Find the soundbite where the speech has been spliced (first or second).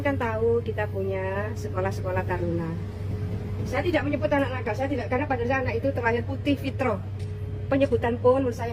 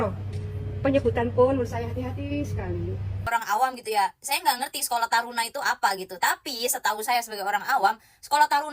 second